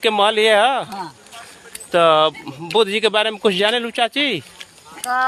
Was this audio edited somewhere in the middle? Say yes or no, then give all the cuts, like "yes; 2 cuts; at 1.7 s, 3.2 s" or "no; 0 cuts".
no; 0 cuts